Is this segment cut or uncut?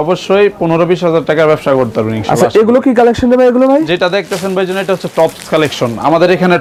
uncut